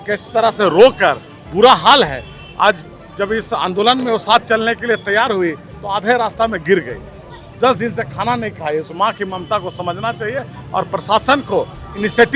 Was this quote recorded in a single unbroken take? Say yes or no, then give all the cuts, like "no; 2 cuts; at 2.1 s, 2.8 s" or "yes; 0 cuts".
yes; 0 cuts